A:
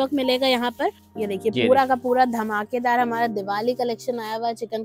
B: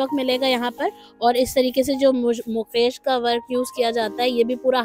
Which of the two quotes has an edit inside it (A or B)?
A